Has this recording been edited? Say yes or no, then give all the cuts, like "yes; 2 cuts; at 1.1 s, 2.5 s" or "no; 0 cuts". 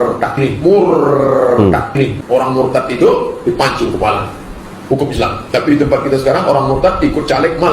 no; 0 cuts